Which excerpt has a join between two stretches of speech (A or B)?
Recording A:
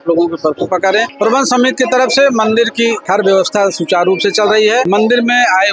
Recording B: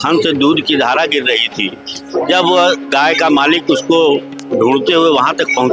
A